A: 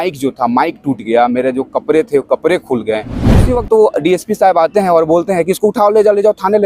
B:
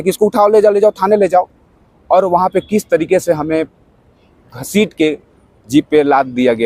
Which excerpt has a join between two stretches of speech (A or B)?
A